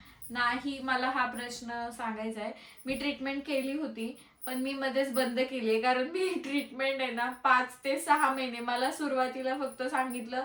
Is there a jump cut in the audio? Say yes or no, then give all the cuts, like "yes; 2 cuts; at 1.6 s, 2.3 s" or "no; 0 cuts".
no; 0 cuts